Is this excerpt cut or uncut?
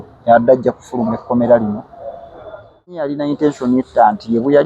cut